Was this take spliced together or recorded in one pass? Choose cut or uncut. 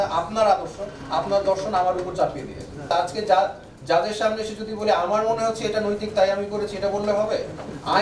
cut